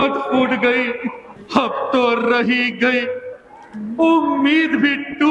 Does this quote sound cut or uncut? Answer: cut